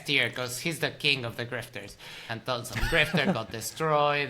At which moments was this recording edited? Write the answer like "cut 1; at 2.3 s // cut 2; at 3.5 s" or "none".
cut 1; at 2.2 s